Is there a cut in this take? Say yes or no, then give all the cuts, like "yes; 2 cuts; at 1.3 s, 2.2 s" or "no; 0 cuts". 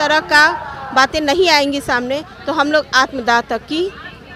no; 0 cuts